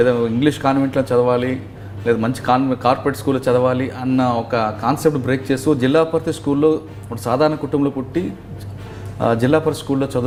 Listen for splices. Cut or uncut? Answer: uncut